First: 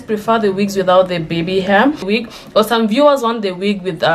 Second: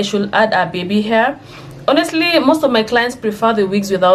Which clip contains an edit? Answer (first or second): first